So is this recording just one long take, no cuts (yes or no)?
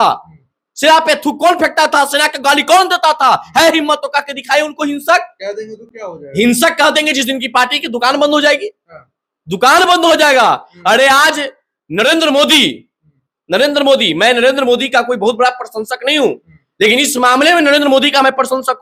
yes